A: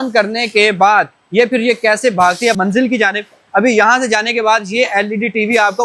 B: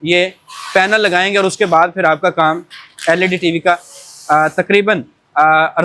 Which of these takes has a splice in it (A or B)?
A